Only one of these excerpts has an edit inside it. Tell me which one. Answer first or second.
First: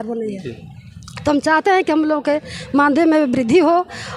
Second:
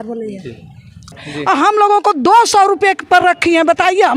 second